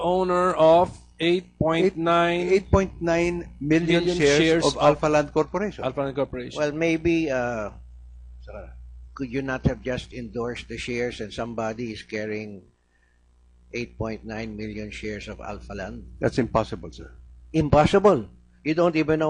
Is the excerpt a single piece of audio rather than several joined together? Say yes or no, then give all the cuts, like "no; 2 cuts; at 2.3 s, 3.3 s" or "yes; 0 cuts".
yes; 0 cuts